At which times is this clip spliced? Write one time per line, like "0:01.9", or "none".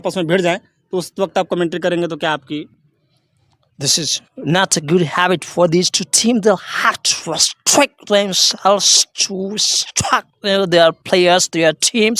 none

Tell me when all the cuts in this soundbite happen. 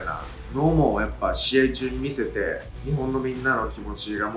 none

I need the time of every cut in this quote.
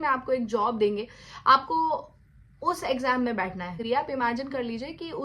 0:03.8

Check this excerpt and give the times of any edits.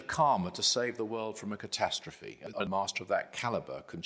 0:02.5

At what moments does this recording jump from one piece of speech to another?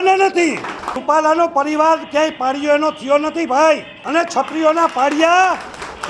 0:01.0
0:03.9

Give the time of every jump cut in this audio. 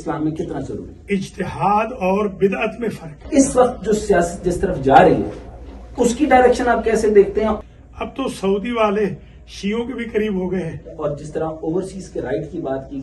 0:03.2
0:07.6
0:10.9

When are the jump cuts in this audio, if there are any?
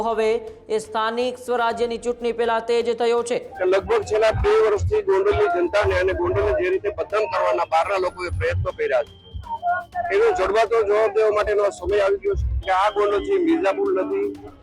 0:03.5
0:12.6

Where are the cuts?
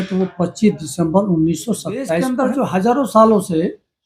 0:02.2

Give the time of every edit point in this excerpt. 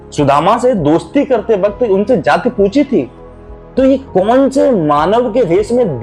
none

